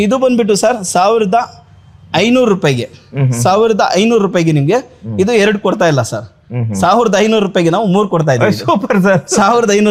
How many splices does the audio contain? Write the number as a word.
zero